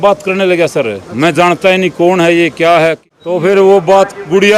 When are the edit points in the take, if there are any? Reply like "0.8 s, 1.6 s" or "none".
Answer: 3.1 s

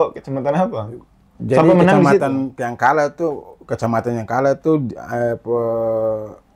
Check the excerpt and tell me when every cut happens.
none

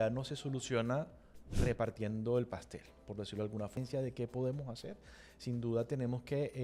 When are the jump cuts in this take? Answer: 3.8 s

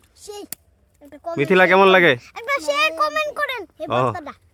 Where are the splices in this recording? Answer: none

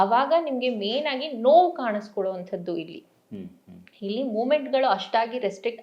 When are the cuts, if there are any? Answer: none

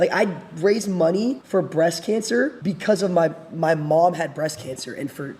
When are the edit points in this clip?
1.4 s, 2.6 s

